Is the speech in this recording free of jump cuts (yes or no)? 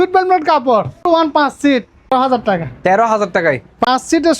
no